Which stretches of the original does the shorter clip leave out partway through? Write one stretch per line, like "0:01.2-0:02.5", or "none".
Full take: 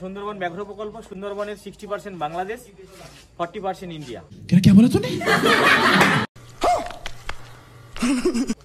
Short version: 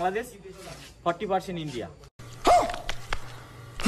0:04.4-0:06.3